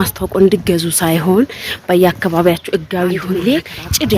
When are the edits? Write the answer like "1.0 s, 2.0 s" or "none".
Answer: 3.2 s